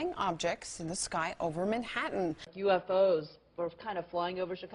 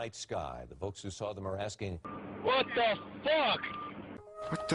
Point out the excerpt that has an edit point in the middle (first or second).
second